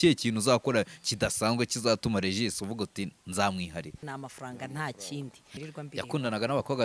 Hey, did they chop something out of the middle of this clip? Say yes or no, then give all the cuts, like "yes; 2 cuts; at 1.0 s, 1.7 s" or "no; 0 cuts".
yes; 2 cuts; at 4.0 s, 5.6 s